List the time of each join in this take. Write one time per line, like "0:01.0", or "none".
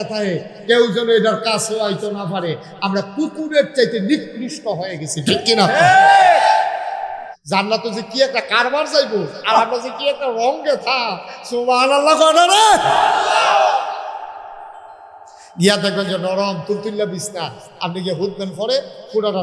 0:07.3